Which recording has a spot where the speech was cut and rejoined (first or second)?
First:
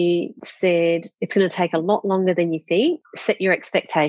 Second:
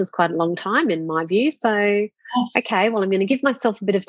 first